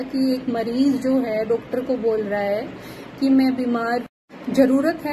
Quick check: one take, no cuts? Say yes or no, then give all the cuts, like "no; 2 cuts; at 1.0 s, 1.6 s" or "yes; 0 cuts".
no; 1 cut; at 4.2 s